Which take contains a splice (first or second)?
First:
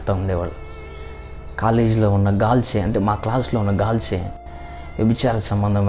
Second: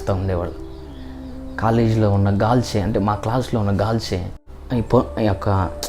second